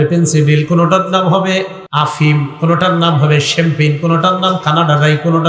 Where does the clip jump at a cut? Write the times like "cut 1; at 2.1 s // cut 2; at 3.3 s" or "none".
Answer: cut 1; at 1.8 s